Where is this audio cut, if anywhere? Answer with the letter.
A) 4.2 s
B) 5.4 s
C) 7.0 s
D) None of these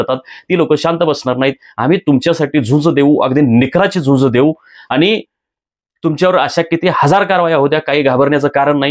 D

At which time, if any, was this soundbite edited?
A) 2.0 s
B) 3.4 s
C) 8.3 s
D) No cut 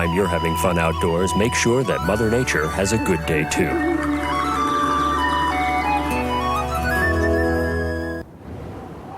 C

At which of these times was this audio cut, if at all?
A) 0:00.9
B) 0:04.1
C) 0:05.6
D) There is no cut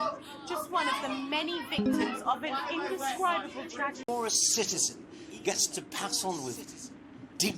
B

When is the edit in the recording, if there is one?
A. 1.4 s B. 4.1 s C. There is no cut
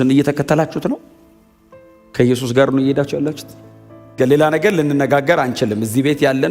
B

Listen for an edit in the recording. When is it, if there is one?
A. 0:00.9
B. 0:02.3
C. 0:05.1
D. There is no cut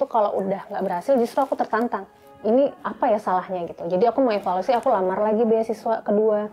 B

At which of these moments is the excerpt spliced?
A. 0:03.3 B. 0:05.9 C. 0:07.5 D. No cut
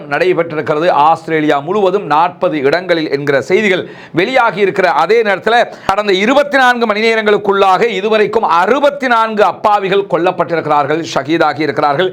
B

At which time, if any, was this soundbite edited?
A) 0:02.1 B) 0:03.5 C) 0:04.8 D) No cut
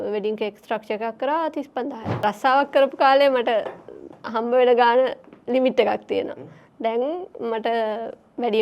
A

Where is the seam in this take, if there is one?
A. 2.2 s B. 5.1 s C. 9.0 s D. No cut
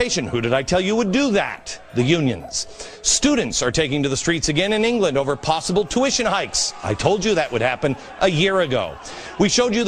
A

